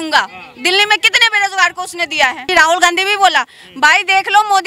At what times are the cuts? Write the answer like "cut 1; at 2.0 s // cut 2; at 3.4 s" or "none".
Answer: cut 1; at 2.5 s